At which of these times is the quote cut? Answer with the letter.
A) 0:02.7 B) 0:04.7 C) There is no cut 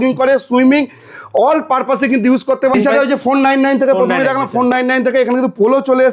A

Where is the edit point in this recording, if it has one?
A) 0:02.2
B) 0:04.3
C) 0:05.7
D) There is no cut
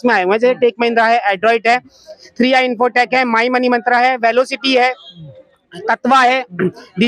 D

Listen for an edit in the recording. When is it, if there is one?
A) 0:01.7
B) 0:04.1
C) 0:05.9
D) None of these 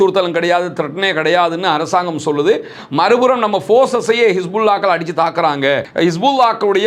C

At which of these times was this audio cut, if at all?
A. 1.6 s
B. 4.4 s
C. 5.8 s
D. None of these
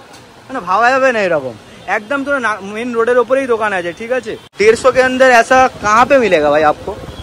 B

